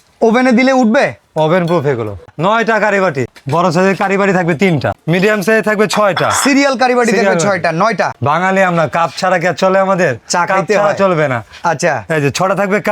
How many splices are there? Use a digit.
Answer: 4